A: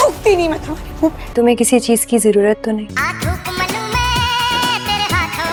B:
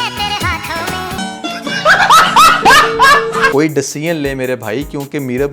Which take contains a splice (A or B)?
B